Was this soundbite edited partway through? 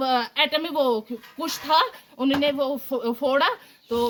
no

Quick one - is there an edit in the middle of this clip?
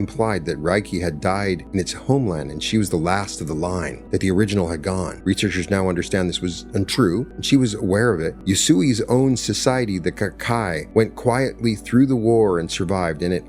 yes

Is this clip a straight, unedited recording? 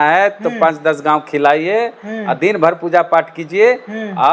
yes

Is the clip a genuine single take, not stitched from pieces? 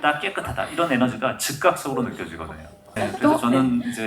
no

